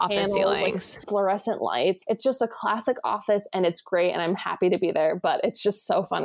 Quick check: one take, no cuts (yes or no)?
no